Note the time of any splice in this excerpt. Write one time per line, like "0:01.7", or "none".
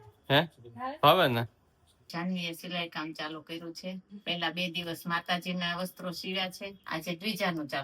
0:01.9
0:04.1
0:06.7